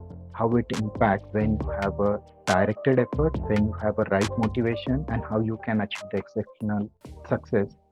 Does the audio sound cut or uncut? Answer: cut